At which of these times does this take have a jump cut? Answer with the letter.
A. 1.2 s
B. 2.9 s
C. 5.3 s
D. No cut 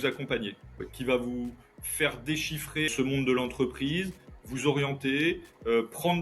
B